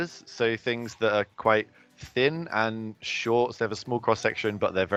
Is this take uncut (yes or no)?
yes